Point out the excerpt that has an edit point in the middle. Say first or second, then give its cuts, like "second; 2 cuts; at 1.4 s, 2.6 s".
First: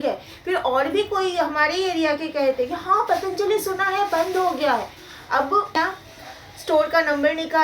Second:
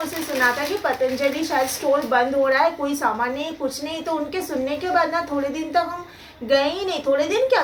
first; 1 cut; at 5.8 s